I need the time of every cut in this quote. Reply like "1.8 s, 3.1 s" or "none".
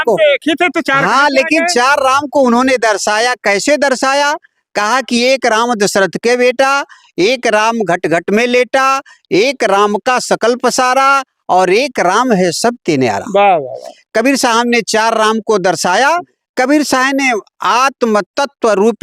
none